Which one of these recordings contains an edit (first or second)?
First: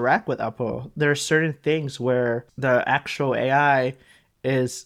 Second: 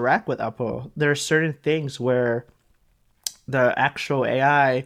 first